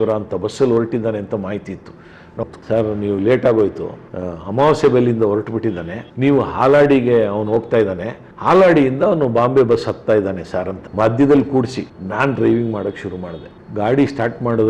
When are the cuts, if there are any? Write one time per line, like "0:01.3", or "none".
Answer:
0:02.4
0:10.8